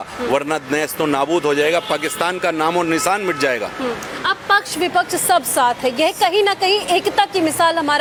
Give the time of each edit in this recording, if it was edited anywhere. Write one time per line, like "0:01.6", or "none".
none